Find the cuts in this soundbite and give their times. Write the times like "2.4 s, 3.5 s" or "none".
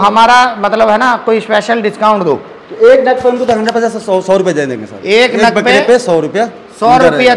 none